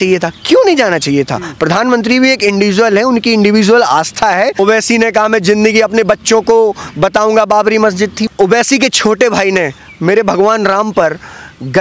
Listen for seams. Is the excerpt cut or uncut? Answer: cut